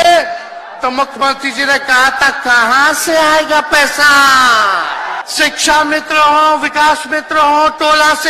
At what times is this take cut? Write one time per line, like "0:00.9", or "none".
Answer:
0:05.2